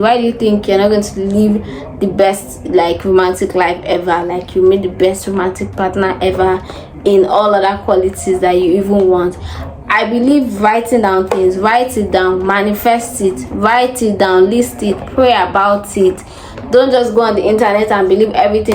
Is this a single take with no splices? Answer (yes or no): yes